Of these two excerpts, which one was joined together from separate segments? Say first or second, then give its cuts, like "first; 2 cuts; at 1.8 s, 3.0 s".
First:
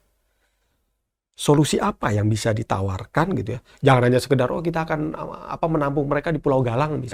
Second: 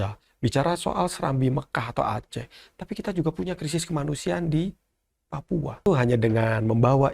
second; 1 cut; at 5.8 s